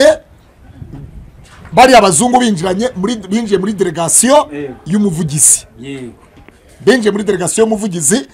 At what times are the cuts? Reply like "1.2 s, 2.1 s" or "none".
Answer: none